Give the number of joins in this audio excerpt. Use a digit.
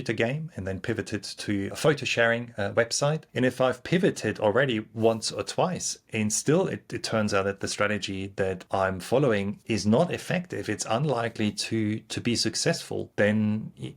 5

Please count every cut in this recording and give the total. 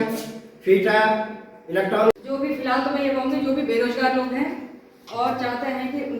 1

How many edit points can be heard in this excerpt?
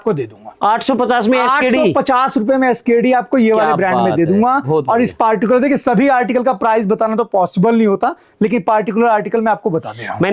0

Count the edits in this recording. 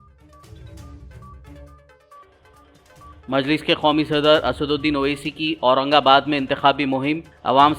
1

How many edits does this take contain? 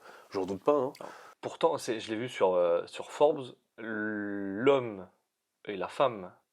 1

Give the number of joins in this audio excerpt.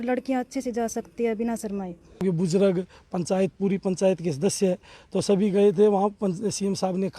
1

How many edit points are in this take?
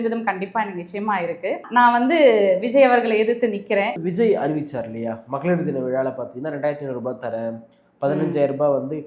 2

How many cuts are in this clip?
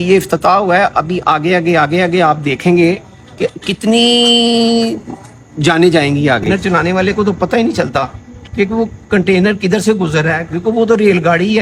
1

